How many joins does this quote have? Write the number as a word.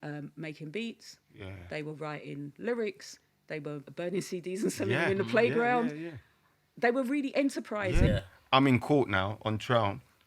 two